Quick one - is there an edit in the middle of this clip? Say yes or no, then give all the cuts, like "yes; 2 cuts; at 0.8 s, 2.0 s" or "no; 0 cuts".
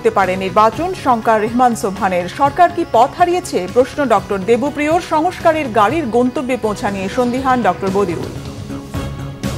yes; 1 cut; at 8.4 s